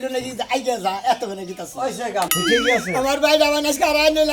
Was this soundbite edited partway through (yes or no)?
yes